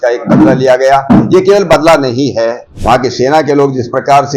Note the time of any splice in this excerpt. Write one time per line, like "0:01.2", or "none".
0:02.7